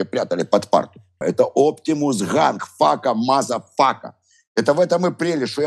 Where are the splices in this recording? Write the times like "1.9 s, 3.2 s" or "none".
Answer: 1.2 s